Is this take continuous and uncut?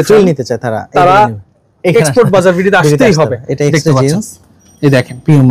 yes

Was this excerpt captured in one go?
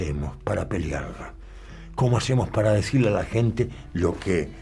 yes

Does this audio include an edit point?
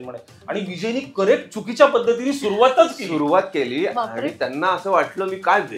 no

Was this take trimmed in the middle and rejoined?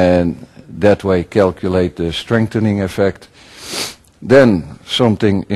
no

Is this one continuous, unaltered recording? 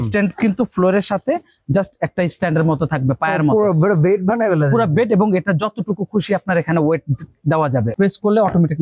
no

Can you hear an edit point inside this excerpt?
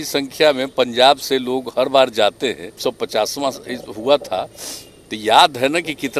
yes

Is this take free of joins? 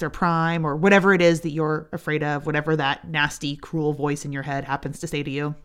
yes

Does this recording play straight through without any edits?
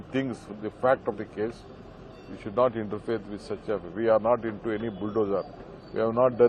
yes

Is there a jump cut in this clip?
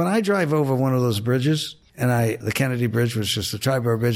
yes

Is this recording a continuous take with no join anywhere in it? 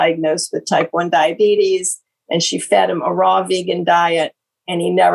yes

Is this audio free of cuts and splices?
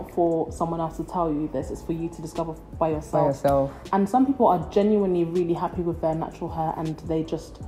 yes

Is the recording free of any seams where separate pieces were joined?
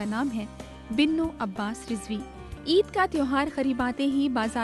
no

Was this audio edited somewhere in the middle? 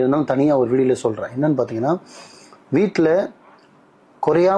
no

